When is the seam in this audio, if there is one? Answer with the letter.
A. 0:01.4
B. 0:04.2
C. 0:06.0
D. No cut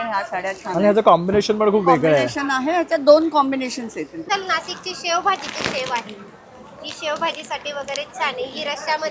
B